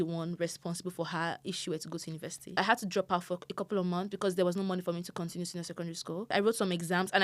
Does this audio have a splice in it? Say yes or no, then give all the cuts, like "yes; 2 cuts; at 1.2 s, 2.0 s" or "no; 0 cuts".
yes; 2 cuts; at 2.6 s, 6.3 s